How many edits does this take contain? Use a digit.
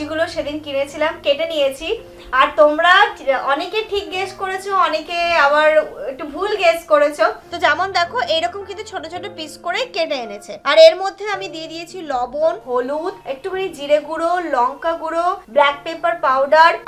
1